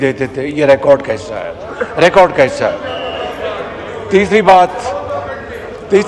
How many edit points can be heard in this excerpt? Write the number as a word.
zero